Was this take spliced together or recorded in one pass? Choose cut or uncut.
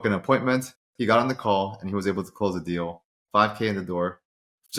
uncut